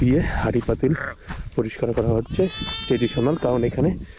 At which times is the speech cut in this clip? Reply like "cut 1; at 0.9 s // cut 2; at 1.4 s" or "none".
none